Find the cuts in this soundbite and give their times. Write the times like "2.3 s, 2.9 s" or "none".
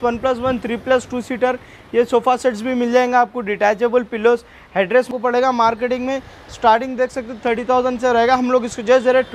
5.1 s